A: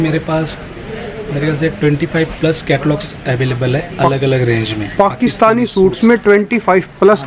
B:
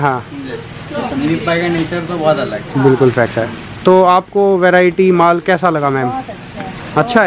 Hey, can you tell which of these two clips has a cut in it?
B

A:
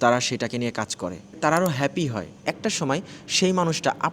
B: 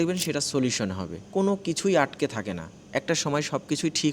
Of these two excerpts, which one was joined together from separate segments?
A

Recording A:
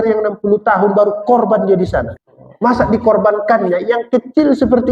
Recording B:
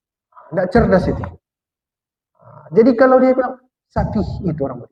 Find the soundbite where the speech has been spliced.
A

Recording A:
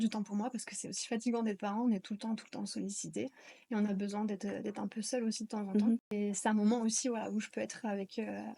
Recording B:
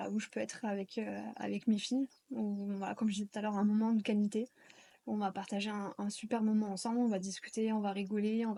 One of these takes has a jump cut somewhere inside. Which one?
A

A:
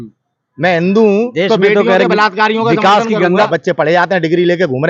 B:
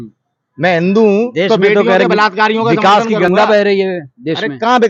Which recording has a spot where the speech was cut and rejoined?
A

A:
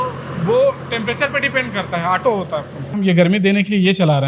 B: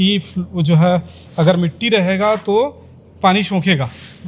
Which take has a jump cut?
A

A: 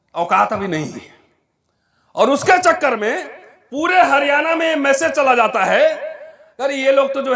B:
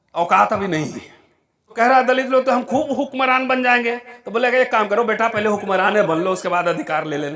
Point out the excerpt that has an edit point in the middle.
B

